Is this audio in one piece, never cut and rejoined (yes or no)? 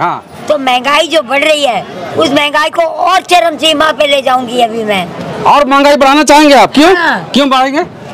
yes